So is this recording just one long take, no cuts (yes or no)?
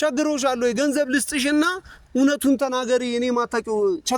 yes